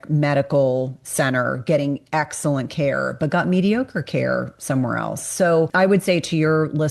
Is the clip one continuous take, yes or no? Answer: no